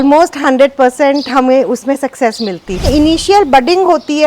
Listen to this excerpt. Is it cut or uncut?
cut